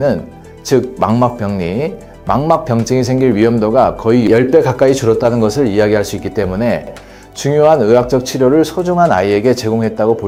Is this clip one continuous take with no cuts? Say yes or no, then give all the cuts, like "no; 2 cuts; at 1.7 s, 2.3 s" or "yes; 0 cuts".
yes; 0 cuts